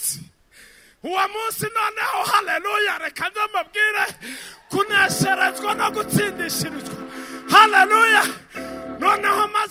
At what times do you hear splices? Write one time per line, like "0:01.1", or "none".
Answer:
none